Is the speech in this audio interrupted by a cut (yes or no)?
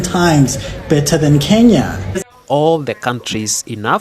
yes